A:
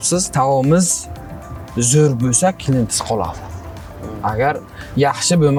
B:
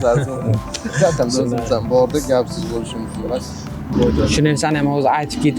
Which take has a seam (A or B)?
B